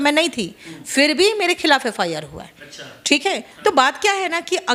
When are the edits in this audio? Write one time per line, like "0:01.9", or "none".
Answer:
none